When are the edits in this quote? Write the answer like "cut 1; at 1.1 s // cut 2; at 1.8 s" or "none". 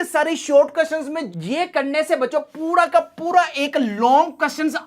cut 1; at 1.2 s